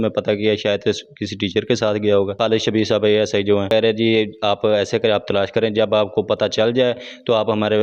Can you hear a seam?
yes; 2 cuts; at 2.3 s, 3.7 s

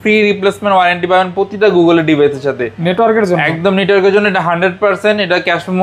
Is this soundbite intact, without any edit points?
yes; 0 cuts

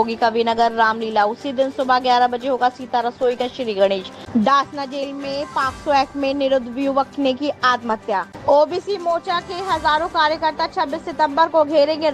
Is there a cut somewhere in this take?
yes; 2 cuts; at 4.1 s, 8.3 s

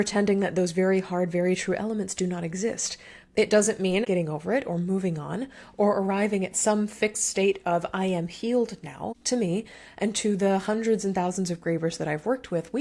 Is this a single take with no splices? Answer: no; 2 cuts; at 4.0 s, 9.2 s

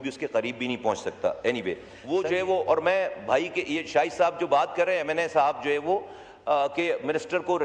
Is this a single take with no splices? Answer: no; 1 cut; at 1.9 s

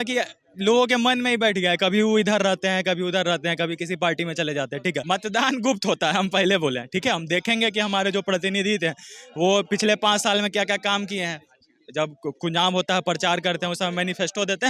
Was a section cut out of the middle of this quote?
yes; 1 cut; at 5.0 s

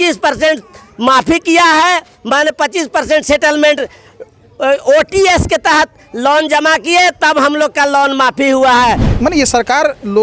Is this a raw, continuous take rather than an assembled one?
no; 1 cut; at 9.1 s

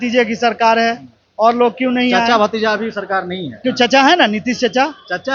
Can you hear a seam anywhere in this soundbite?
yes; 1 cut; at 3.6 s

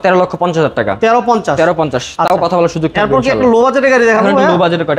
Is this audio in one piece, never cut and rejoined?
yes; 0 cuts

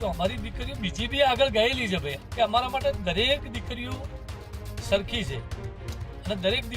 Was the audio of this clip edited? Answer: yes; 1 cut; at 2.2 s

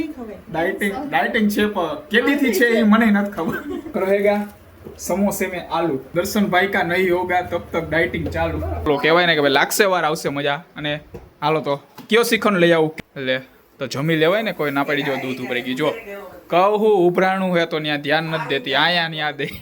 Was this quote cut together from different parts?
yes; 4 cuts; at 3.9 s, 6.0 s, 8.9 s, 12.9 s

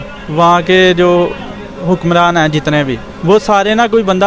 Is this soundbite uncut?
yes; 0 cuts

